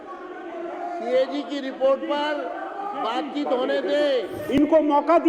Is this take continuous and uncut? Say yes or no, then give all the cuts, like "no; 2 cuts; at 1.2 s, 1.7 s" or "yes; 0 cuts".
no; 1 cut; at 4.4 s